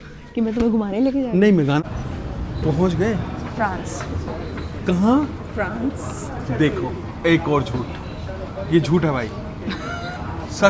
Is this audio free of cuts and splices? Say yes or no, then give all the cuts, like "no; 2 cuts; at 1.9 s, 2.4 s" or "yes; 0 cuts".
no; 1 cut; at 1.7 s